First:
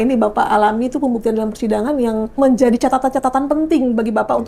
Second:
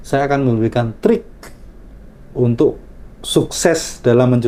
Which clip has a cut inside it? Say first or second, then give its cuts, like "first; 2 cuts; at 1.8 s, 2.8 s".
first; 1 cut; at 2.4 s